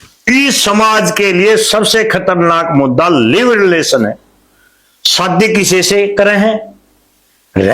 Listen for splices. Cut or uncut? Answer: uncut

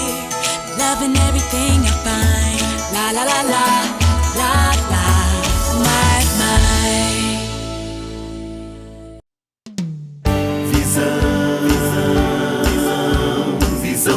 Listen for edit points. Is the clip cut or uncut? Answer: uncut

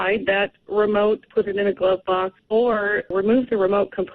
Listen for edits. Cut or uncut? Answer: cut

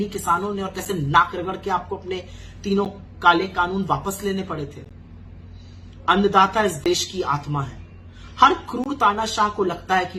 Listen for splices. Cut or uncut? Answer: uncut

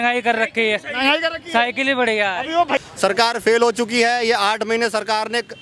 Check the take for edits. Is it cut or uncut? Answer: cut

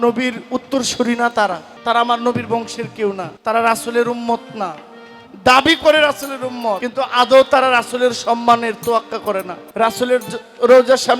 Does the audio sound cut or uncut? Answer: cut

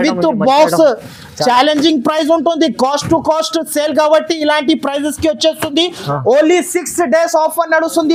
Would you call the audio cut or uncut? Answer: uncut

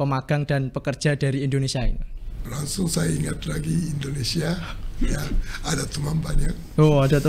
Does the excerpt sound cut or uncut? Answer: cut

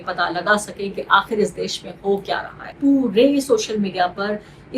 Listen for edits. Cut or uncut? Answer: cut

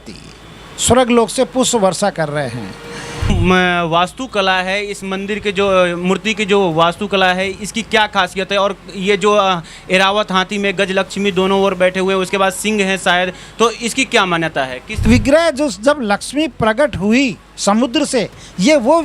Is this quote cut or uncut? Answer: cut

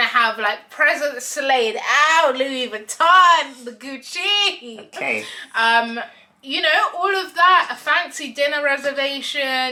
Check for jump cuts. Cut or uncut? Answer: uncut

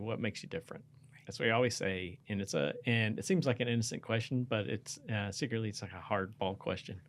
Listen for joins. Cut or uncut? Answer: uncut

